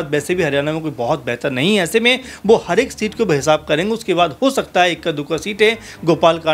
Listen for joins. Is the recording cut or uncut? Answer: uncut